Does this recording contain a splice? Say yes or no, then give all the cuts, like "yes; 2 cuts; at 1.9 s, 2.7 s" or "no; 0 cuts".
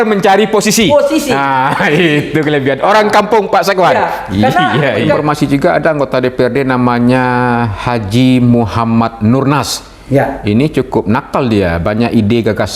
yes; 1 cut; at 5.2 s